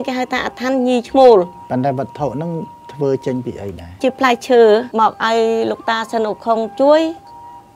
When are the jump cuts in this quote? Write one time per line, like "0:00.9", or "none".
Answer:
0:04.0
0:04.9